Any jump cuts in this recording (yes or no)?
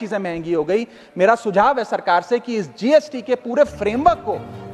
no